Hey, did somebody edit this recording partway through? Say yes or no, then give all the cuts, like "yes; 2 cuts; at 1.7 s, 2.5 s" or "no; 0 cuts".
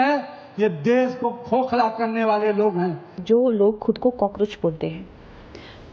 yes; 1 cut; at 3.2 s